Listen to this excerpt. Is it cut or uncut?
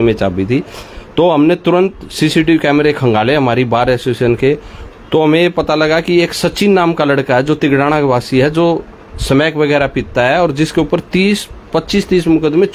uncut